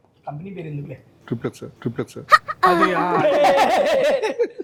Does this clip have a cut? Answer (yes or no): no